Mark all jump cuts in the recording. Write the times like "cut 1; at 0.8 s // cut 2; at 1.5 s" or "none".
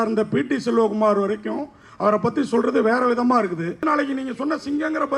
cut 1; at 3.8 s